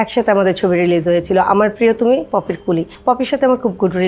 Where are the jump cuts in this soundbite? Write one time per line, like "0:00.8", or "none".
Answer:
0:02.9